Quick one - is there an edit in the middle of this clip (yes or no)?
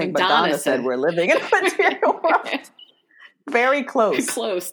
no